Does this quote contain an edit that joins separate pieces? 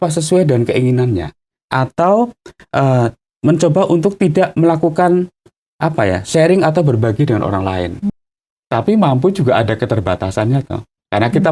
yes; 1 cut; at 8.1 s

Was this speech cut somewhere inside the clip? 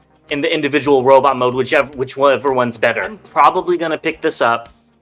yes; 1 cut; at 3.2 s

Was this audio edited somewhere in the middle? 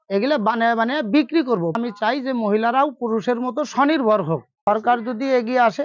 yes; 2 cuts; at 1.8 s, 4.5 s

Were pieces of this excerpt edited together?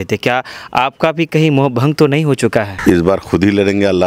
yes; 1 cut; at 2.7 s

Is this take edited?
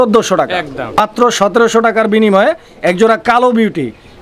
yes; 1 cut; at 1.3 s

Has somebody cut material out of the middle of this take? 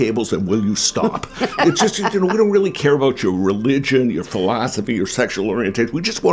no; 0 cuts

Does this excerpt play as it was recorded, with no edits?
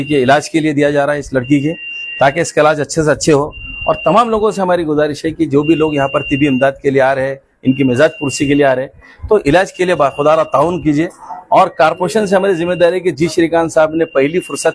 yes; 0 cuts

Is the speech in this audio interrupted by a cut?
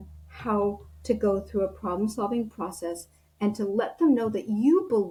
no; 0 cuts

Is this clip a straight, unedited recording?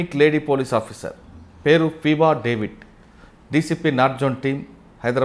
yes; 0 cuts

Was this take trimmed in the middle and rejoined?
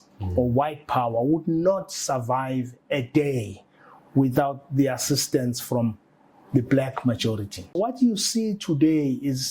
yes; 1 cut; at 7.8 s

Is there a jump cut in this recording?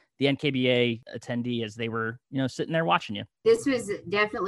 yes; 2 cuts; at 1.1 s, 3.4 s

